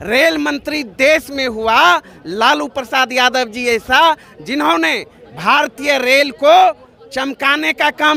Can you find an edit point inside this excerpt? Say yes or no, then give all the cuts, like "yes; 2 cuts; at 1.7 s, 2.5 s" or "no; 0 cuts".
no; 0 cuts